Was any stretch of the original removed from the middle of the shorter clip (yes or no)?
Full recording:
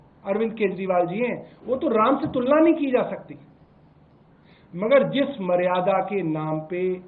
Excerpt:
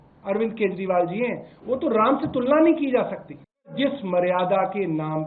yes